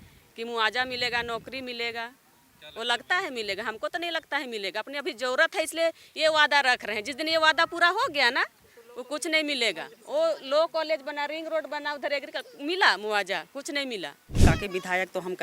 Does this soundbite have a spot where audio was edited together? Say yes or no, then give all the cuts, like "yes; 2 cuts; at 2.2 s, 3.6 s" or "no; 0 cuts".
yes; 1 cut; at 14.4 s